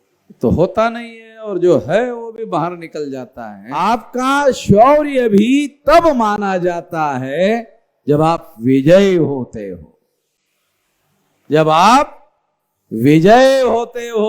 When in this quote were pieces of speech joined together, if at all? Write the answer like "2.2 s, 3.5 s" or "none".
3.8 s